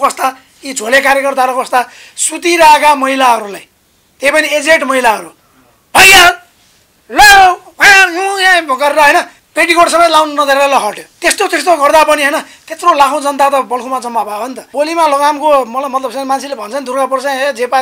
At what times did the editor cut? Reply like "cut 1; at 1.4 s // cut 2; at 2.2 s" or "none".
cut 1; at 14.7 s